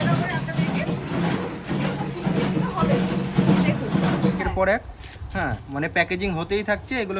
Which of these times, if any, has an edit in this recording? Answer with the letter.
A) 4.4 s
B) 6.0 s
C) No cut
A